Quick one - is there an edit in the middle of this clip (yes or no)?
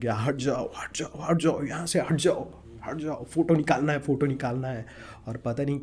no